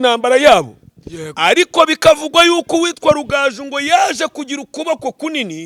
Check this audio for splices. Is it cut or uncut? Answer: uncut